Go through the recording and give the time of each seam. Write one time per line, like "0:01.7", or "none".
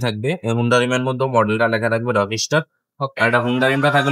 none